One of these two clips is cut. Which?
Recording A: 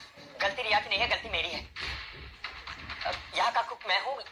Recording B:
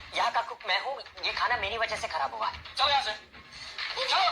B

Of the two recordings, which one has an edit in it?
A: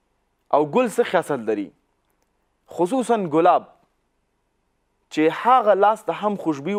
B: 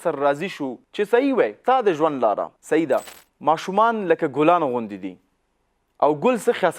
B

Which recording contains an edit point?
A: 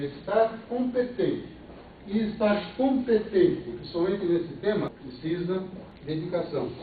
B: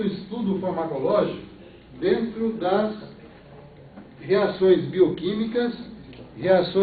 A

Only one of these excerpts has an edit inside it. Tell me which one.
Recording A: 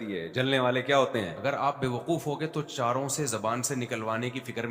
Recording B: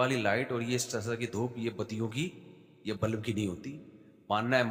A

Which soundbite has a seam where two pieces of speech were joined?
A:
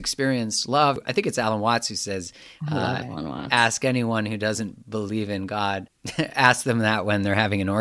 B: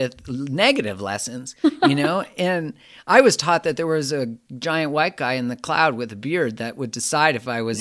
A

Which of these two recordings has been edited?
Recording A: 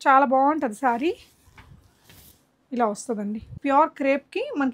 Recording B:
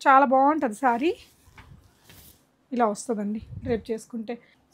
A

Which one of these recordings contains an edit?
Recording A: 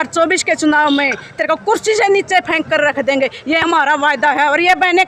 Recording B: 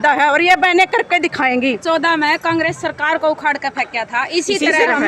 B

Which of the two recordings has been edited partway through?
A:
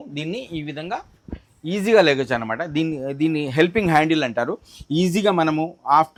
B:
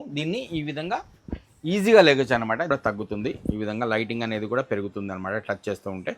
B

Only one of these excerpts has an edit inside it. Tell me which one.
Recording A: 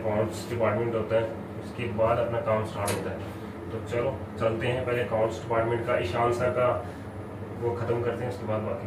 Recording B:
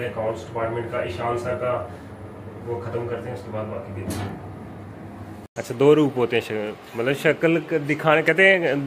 B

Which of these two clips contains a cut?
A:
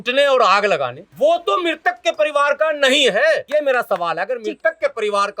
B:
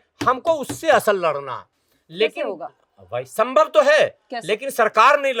A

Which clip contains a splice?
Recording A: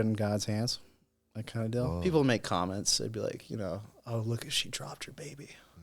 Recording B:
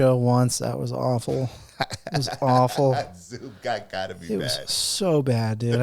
A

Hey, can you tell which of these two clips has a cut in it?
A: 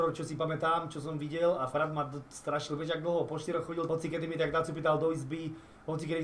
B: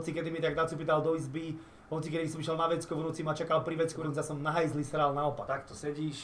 B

